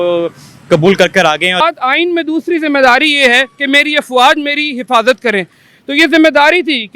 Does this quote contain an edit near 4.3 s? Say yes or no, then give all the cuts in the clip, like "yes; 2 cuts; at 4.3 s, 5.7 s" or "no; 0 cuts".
no; 2 cuts; at 1.6 s, 5.6 s